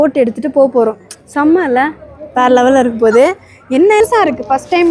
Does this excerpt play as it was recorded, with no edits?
no; 1 cut; at 4.0 s

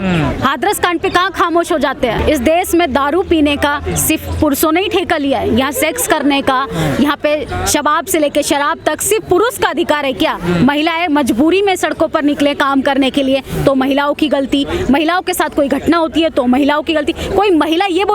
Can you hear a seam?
yes; 1 cut; at 2.2 s

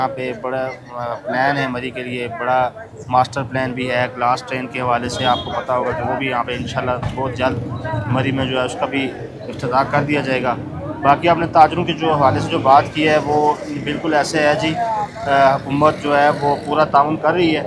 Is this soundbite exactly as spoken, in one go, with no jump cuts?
yes; 0 cuts

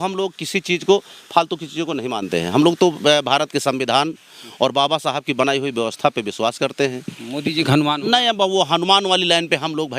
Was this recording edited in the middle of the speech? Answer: yes; 1 cut; at 7.1 s

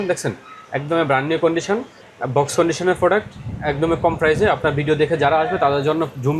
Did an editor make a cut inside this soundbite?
no; 0 cuts

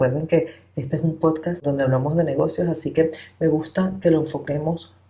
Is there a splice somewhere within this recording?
yes; 1 cut; at 1.6 s

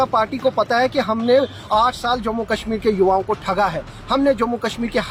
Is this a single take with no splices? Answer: yes; 0 cuts

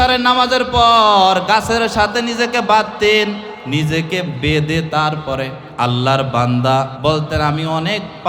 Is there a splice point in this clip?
yes; 3 cuts; at 3.5 s, 5.6 s, 6.9 s

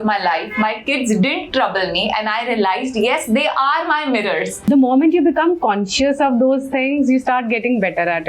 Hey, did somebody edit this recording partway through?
yes; 1 cut; at 4.7 s

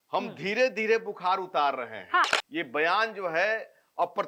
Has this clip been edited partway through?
yes; 1 cut; at 2.3 s

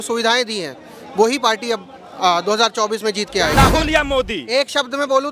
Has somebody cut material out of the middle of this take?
yes; 1 cut; at 3.5 s

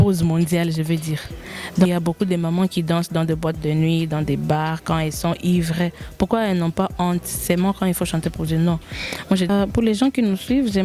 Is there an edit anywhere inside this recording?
yes; 2 cuts; at 1.9 s, 9.5 s

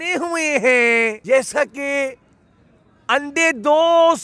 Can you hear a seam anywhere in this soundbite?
yes; 1 cut; at 1.2 s

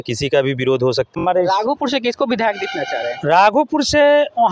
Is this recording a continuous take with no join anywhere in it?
no; 1 cut; at 1.1 s

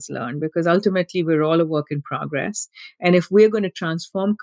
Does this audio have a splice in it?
no; 0 cuts

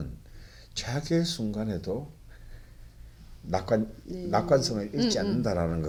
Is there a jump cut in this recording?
no; 0 cuts

